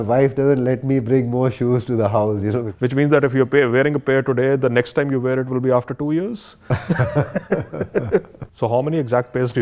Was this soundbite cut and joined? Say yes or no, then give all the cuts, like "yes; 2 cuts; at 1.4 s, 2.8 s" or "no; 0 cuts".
yes; 2 cuts; at 2.7 s, 8.4 s